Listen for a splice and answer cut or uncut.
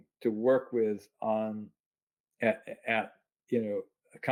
uncut